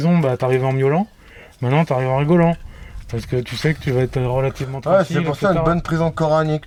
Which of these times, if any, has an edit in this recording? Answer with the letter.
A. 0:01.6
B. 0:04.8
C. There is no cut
C